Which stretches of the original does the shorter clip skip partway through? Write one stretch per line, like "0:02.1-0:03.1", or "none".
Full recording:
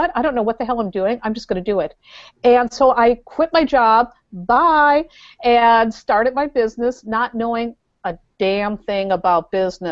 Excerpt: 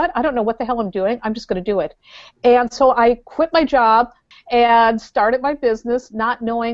0:04.3-0:05.2